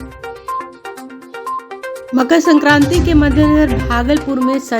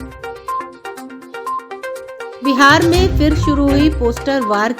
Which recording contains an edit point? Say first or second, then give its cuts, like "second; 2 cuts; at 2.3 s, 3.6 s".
first; 1 cut; at 1.7 s